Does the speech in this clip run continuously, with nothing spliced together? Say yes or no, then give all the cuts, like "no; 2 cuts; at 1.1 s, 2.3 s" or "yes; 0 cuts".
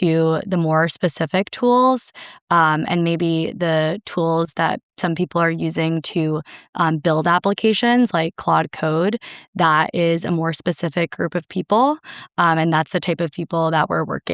yes; 0 cuts